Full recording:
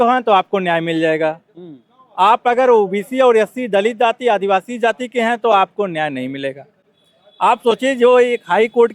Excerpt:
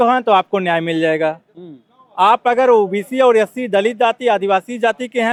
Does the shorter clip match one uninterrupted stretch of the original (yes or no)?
yes